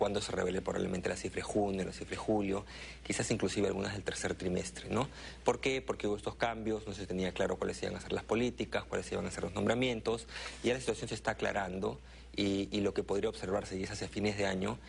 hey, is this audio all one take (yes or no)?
no